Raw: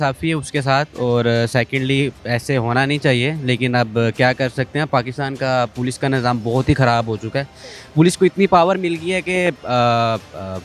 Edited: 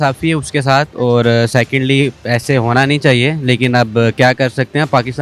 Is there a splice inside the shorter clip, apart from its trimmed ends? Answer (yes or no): no